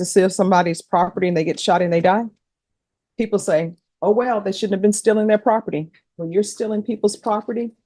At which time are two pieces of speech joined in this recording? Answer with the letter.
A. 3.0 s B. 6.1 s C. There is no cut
B